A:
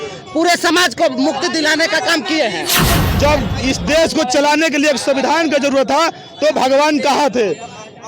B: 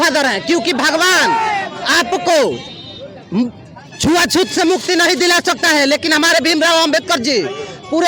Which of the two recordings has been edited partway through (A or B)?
A